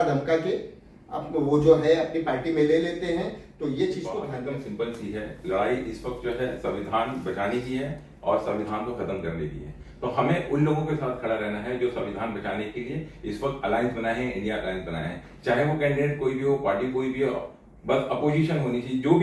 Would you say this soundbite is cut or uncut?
cut